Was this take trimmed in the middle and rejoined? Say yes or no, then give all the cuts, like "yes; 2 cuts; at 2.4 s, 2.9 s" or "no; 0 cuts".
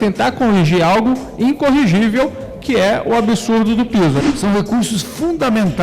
yes; 1 cut; at 4.2 s